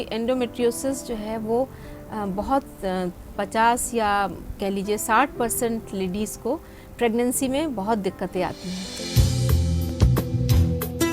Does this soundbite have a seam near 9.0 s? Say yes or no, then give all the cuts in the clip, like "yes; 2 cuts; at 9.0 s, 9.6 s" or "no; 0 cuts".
yes; 1 cut; at 9.0 s